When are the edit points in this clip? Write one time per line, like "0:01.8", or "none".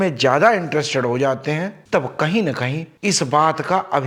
none